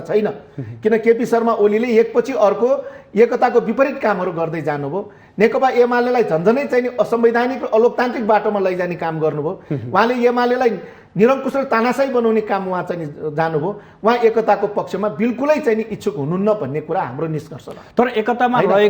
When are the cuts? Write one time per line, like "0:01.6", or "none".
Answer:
none